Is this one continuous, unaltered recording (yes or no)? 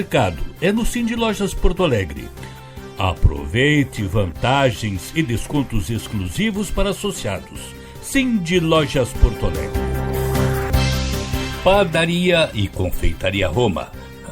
no